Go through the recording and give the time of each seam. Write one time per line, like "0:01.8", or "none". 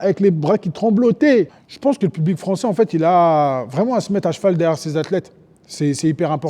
0:01.6